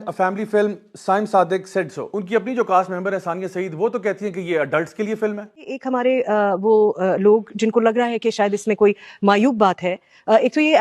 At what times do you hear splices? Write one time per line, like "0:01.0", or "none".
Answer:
0:02.2

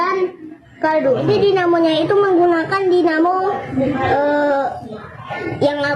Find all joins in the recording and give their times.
0:01.2

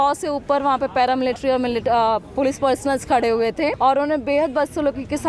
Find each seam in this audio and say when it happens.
0:03.8

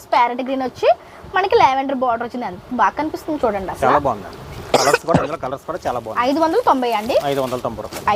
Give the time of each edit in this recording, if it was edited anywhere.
none

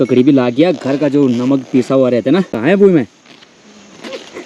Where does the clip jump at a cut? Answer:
0:02.6

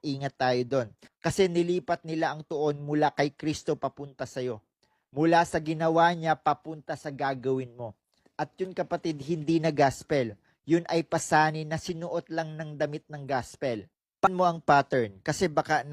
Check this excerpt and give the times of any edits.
0:14.3

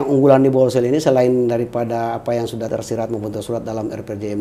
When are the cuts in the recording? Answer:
0:02.7

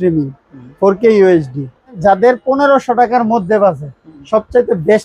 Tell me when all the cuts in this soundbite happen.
0:02.0

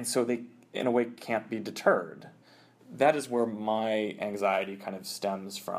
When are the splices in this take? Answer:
0:02.6

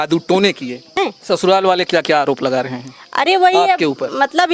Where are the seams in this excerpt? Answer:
0:00.9

